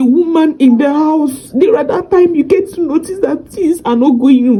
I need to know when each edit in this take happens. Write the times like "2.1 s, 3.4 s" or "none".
none